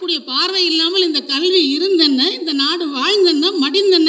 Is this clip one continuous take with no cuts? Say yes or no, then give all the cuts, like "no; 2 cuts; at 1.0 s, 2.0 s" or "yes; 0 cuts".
yes; 0 cuts